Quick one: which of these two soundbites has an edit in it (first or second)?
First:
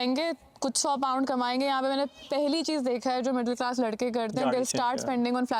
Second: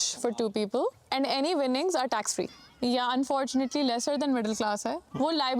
second